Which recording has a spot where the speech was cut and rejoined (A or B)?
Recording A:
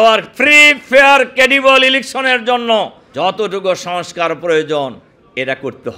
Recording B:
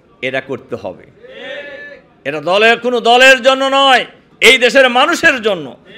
A